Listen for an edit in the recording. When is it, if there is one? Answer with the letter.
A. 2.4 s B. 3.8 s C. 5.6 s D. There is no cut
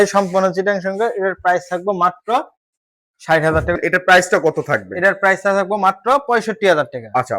B